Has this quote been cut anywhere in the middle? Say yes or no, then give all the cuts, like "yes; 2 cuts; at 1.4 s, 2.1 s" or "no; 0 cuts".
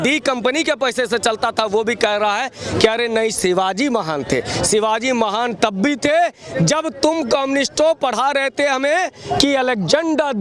no; 0 cuts